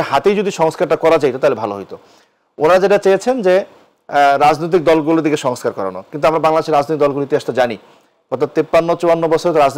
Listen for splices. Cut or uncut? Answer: uncut